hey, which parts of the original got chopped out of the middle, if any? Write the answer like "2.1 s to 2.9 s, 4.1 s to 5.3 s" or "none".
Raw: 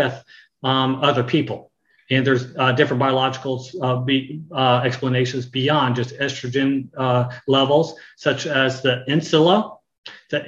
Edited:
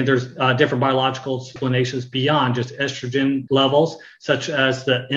3.7 s to 5.0 s, 6.8 s to 7.4 s